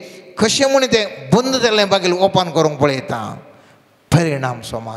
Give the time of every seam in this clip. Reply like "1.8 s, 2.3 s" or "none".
none